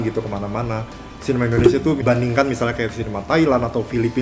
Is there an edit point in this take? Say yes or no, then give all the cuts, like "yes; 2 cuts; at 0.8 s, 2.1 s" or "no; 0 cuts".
yes; 1 cut; at 2.0 s